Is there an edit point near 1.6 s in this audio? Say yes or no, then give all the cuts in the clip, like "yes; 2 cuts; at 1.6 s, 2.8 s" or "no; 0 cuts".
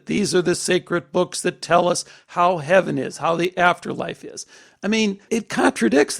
no; 1 cut; at 5.2 s